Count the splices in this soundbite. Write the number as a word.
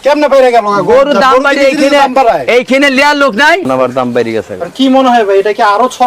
one